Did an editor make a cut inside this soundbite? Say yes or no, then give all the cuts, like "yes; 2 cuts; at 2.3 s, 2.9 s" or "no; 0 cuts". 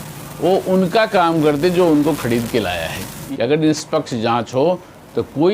yes; 1 cut; at 3.2 s